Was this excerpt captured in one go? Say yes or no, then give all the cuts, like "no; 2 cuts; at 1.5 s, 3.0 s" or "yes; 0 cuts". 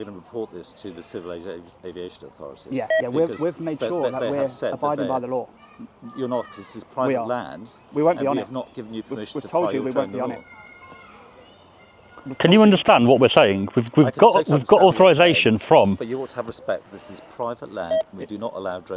yes; 0 cuts